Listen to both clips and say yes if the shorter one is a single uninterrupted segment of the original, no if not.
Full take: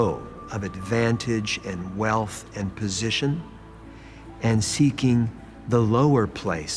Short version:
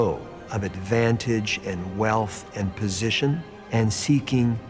no